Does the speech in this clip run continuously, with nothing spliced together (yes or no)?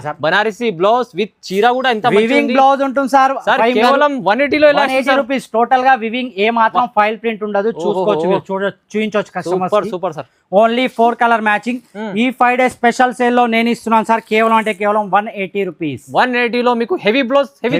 yes